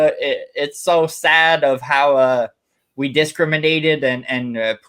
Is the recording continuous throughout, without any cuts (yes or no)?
yes